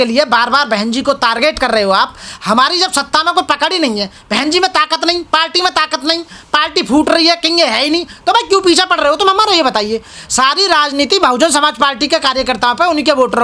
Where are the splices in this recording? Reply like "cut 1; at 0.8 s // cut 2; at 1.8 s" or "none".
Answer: none